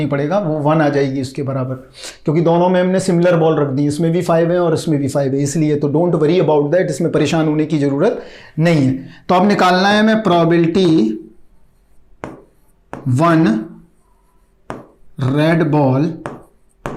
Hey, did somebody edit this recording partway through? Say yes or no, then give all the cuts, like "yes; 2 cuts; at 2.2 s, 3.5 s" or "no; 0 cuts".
no; 0 cuts